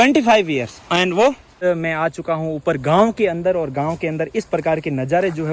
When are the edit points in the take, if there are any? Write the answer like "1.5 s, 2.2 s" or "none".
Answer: 1.6 s